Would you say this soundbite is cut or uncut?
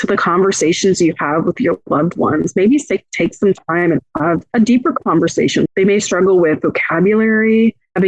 cut